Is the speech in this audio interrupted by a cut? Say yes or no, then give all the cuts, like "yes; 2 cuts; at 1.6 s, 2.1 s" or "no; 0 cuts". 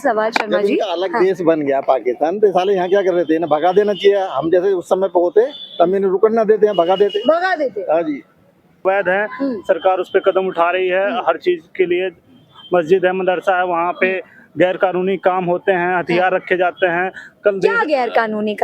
yes; 1 cut; at 8.8 s